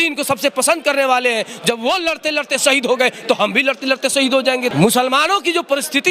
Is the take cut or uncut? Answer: cut